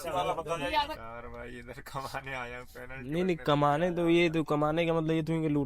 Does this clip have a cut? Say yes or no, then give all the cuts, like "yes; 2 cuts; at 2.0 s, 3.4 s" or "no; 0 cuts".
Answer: yes; 1 cut; at 1.0 s